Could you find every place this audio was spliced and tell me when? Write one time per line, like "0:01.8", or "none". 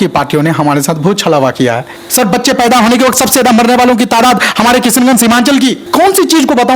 0:01.9
0:05.8